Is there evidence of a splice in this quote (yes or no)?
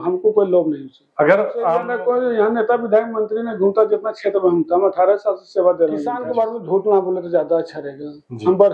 yes